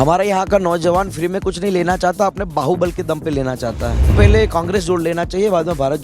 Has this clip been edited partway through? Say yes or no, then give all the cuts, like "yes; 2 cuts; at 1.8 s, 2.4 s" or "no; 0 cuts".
yes; 1 cut; at 4.1 s